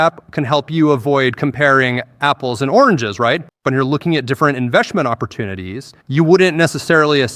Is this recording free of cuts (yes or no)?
yes